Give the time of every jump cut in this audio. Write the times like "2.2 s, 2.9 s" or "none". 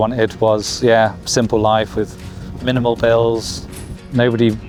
none